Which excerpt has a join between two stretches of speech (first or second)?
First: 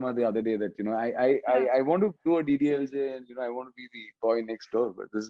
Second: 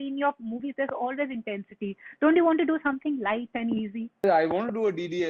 second